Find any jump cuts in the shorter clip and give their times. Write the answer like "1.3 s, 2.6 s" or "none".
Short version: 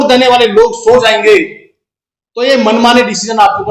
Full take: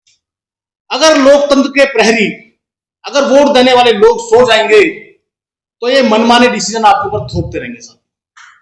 none

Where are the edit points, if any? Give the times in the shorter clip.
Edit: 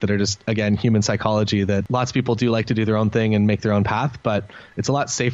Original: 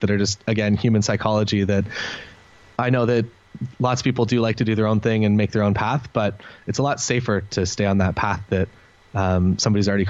1.9 s

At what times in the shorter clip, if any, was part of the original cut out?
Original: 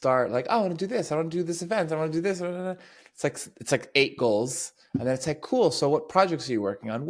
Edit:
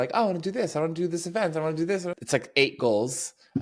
2.2 s

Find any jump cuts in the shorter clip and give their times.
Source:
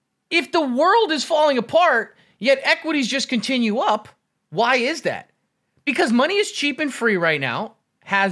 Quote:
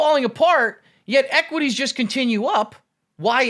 none

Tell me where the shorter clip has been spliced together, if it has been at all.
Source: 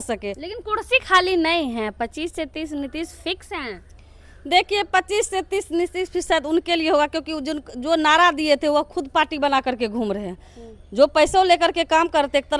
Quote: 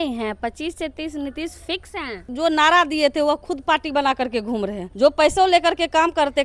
2.2 s, 4.8 s

